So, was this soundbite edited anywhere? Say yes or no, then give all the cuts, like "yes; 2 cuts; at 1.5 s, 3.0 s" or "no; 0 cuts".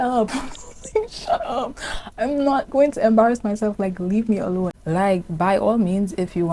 yes; 1 cut; at 4.8 s